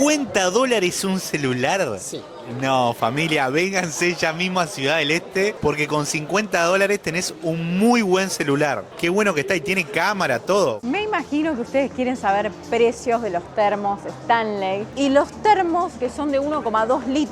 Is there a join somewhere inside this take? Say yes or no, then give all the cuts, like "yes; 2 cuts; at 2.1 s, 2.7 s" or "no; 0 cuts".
yes; 2 cuts; at 10.8 s, 14.9 s